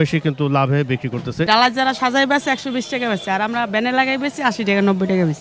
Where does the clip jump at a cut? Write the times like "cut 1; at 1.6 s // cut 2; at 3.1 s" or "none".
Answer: cut 1; at 1.5 s

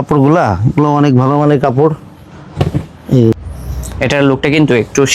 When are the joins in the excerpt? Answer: cut 1; at 3.3 s

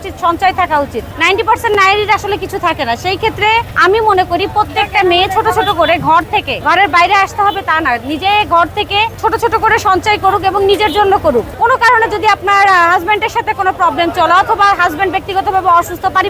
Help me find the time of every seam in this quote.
cut 1; at 1.1 s // cut 2; at 3.7 s // cut 3; at 6.5 s // cut 4; at 9.1 s // cut 5; at 11.5 s

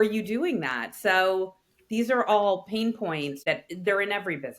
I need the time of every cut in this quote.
cut 1; at 3.4 s

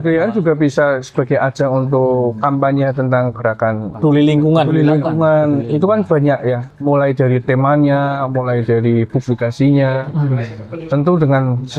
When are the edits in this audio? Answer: cut 1; at 3.9 s // cut 2; at 6.7 s

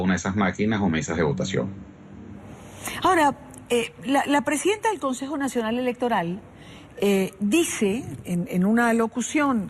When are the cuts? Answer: none

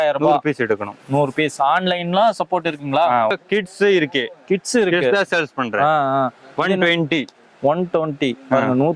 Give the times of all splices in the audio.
cut 1; at 3.3 s

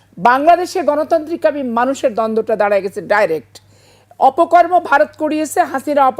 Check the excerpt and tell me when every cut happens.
none

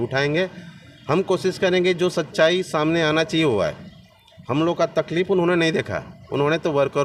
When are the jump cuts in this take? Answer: none

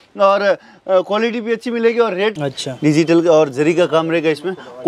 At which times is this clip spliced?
cut 1; at 2.4 s

